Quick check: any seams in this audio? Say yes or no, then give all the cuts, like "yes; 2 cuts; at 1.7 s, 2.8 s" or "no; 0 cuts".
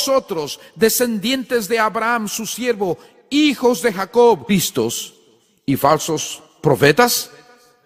no; 0 cuts